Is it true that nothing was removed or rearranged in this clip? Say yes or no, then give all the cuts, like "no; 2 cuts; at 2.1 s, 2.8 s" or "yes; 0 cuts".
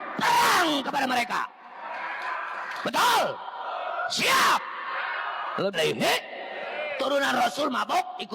no; 1 cut; at 5.8 s